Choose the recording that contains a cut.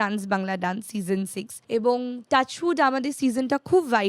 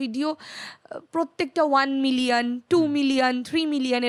first; 1 cut; at 1.5 s

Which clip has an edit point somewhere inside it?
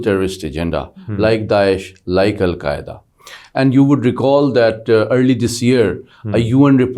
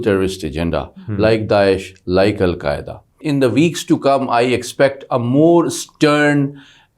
second; 1 cut; at 3.2 s

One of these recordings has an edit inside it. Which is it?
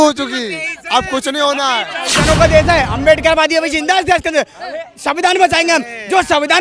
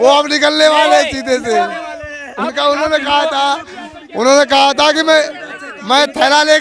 first; 1 cut; at 2.2 s

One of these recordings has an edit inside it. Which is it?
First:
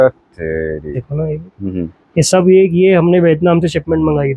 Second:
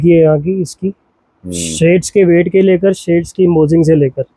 first; 1 cut; at 1.1 s

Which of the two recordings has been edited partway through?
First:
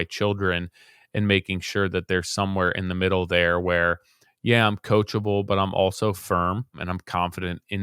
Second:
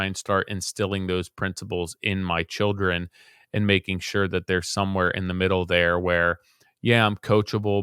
first; 1 cut; at 6.9 s

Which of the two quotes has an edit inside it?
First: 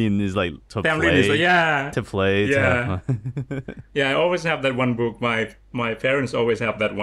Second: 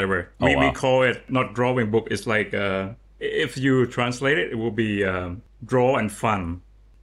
second; 1 cut; at 1.2 s

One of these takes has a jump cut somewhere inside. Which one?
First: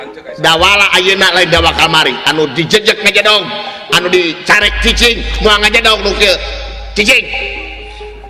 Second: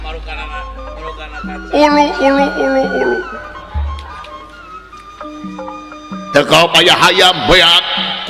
second; 1 cut; at 5.9 s

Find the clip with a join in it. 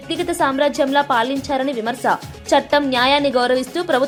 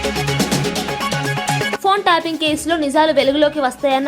second; 1 cut; at 1.8 s

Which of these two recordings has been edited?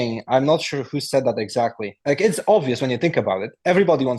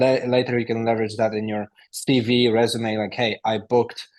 first; 1 cut; at 1.9 s

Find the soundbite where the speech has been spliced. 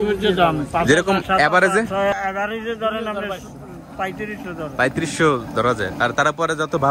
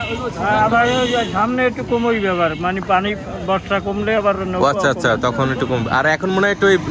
first; 1 cut; at 2.1 s

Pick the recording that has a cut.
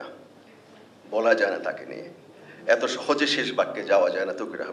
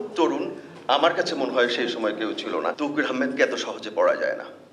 second; 1 cut; at 2.8 s

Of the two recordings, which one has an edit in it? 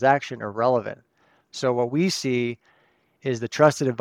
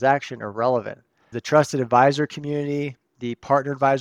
second; 1 cut; at 1.4 s

